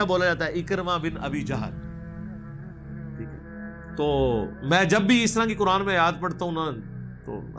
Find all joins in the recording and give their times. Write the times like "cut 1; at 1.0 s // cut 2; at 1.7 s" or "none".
cut 1; at 1.6 s // cut 2; at 4.0 s